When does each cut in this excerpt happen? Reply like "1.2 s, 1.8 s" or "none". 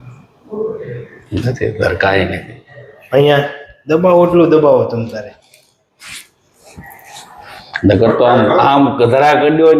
none